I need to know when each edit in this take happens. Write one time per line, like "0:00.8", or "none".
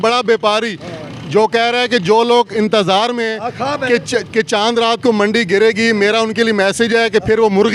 0:02.5